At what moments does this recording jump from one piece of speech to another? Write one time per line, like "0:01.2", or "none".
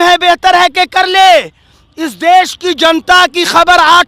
none

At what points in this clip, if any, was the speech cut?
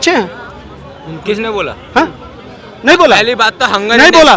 none

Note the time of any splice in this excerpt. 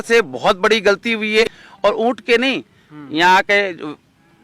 0:01.4

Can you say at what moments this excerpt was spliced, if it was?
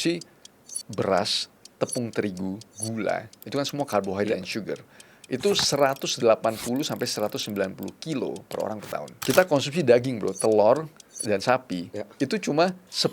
0:09.1

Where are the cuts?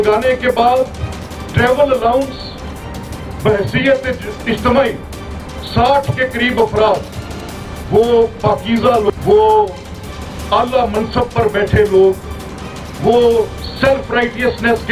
none

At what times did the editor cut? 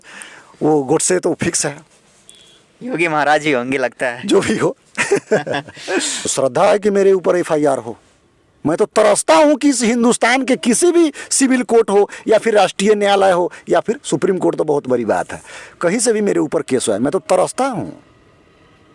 0:06.3

